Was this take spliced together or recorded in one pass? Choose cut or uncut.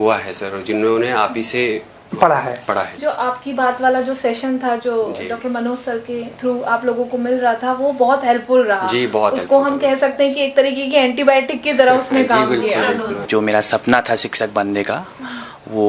cut